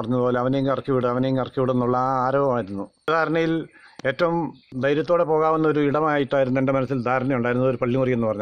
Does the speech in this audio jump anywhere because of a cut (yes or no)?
yes